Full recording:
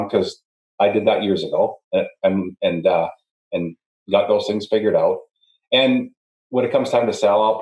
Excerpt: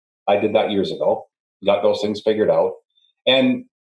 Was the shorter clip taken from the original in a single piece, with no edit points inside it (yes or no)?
no